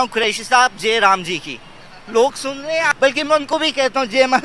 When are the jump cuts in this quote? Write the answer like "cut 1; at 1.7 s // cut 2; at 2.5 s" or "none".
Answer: cut 1; at 2.9 s